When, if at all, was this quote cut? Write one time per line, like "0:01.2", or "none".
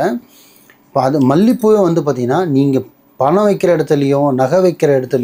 none